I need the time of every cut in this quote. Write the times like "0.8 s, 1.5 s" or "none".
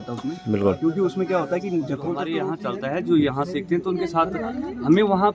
2.5 s